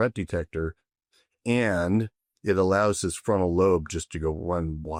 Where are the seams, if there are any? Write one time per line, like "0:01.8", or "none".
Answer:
none